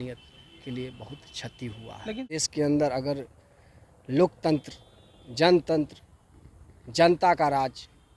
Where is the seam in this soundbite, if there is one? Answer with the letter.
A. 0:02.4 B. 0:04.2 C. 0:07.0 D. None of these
A